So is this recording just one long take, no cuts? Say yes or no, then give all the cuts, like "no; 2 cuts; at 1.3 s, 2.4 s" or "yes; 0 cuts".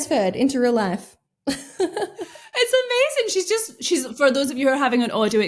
yes; 0 cuts